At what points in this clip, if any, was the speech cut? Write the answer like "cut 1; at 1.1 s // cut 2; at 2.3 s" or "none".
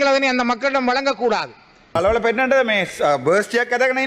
cut 1; at 2.0 s